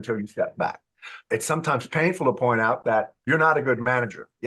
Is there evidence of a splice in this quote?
yes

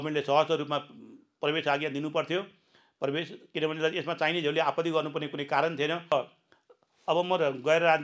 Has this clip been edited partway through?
yes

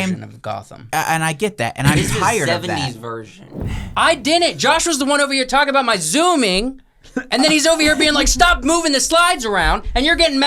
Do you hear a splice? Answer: yes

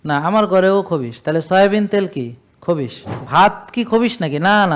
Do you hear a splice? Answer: yes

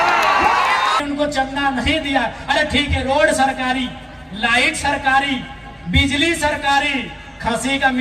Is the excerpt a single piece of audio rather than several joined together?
no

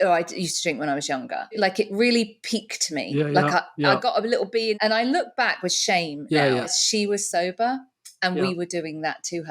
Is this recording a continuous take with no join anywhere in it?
no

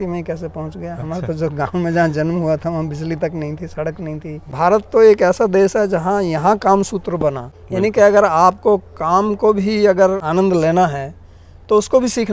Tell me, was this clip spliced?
yes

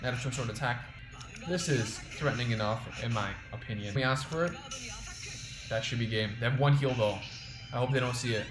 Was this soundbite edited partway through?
yes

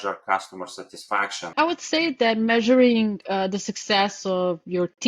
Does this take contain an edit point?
yes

